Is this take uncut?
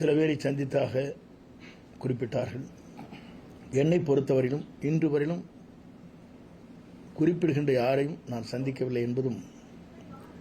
yes; 0 cuts

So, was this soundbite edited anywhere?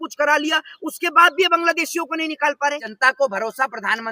yes; 1 cut; at 2.9 s

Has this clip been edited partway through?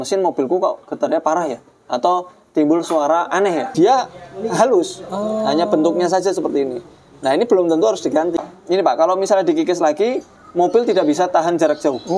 yes; 2 cuts; at 3.7 s, 8.5 s

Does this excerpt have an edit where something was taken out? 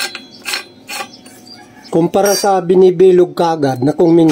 yes; 1 cut; at 1.8 s

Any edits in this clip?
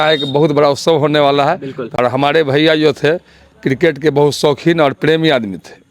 yes; 1 cut; at 1.9 s

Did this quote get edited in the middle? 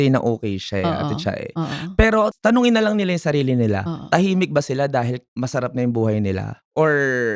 no; 0 cuts

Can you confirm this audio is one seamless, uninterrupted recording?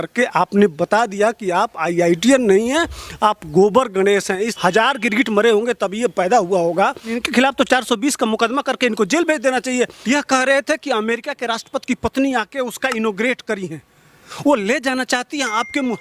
no; 3 cuts; at 4.5 s, 7.2 s, 10.0 s

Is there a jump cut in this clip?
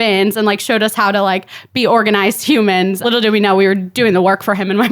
yes; 1 cut; at 3.0 s

